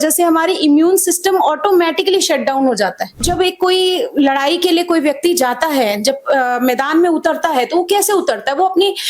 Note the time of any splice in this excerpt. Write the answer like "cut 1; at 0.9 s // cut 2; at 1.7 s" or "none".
cut 1; at 3.1 s

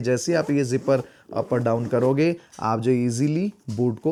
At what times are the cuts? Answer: none

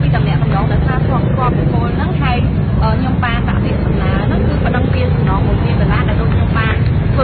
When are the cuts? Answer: cut 1; at 2.3 s

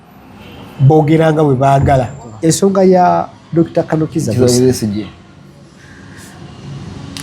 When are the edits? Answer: cut 1; at 2.2 s

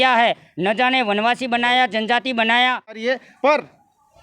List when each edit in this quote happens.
cut 1; at 3.0 s

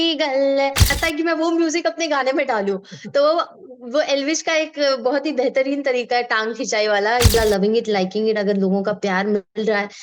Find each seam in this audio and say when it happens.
cut 1; at 0.9 s // cut 2; at 7.3 s

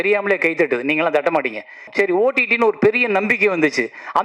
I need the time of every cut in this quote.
cut 1; at 1.9 s

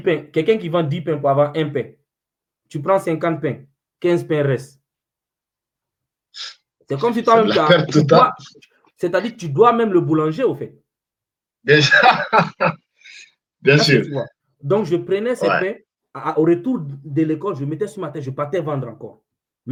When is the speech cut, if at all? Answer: none

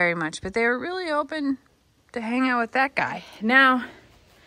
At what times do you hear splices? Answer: cut 1; at 3.2 s

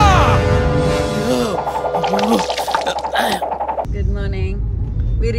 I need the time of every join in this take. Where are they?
cut 1; at 3.9 s

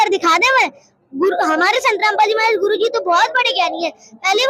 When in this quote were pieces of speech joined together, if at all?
none

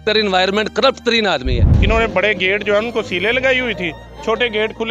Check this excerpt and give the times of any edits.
cut 1; at 1.7 s

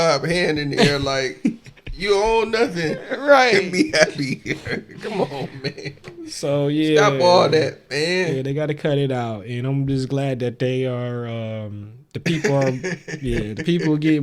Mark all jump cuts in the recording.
none

